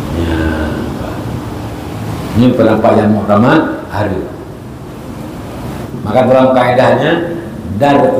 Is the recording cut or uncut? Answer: cut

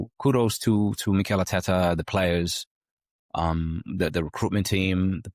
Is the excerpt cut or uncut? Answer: uncut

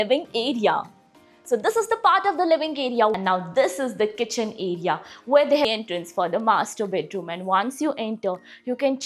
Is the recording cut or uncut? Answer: cut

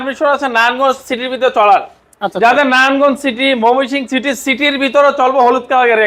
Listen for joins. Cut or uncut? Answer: uncut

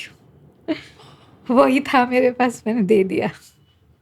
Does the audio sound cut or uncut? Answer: uncut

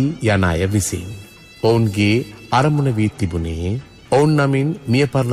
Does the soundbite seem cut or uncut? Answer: uncut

